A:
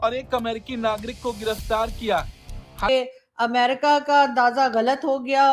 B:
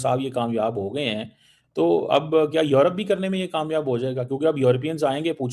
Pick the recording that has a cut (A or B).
A